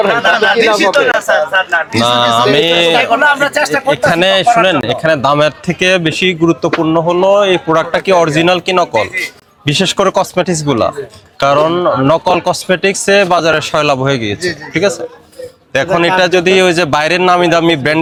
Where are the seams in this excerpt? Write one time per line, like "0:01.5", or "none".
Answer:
none